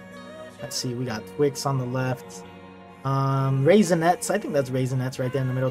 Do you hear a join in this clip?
no; 0 cuts

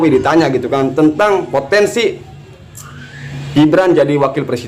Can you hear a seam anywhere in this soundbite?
no; 0 cuts

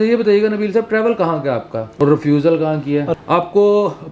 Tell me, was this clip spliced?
yes; 2 cuts; at 1.9 s, 3.1 s

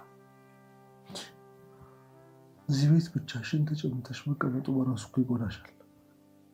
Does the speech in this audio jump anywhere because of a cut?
no; 0 cuts

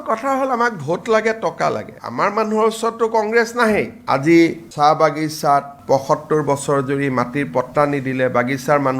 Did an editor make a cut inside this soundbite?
no; 0 cuts

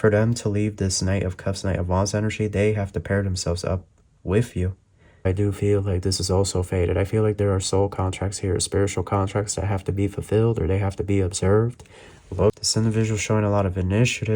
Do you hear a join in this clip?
yes; 2 cuts; at 5.3 s, 12.6 s

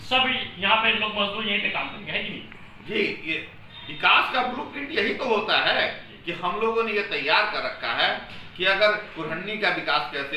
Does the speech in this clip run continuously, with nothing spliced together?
yes; 0 cuts

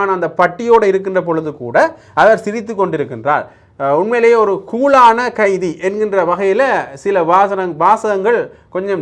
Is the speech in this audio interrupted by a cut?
no; 0 cuts

